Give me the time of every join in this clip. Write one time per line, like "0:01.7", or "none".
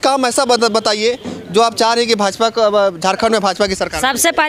none